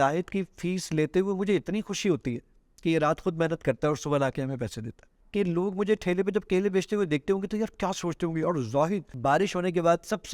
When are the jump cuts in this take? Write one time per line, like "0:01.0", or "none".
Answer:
0:05.1
0:09.1